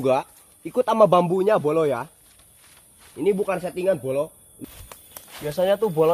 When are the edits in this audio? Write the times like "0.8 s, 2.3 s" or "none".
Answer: 4.5 s